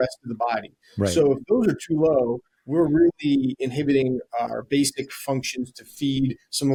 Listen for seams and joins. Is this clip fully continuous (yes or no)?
yes